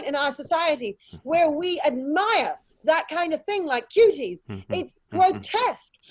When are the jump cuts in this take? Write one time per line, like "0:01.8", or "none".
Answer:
none